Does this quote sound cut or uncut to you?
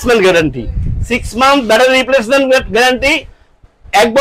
uncut